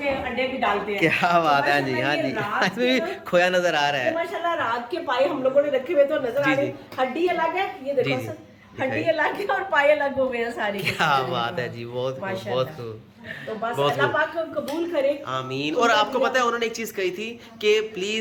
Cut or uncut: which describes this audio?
uncut